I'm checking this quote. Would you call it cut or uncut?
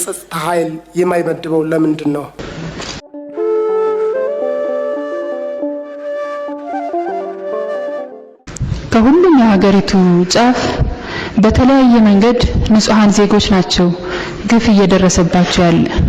cut